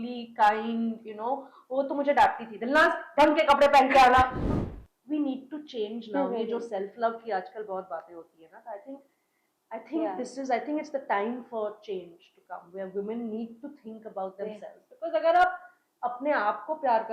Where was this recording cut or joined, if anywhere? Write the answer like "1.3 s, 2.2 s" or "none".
4.5 s